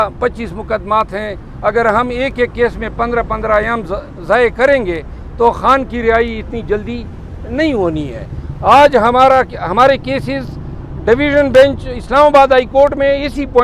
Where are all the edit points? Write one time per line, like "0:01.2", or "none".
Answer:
none